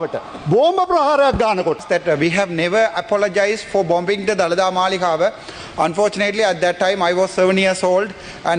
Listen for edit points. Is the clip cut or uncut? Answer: cut